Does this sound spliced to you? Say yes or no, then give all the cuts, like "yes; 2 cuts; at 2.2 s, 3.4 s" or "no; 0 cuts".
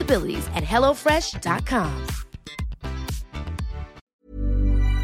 yes; 1 cut; at 4.0 s